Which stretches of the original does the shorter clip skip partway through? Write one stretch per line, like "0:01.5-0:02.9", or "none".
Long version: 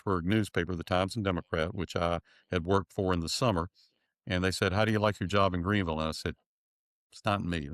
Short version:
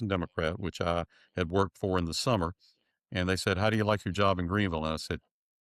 none